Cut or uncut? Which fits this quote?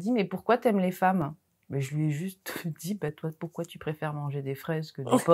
uncut